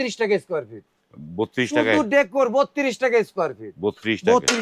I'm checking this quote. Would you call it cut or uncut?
uncut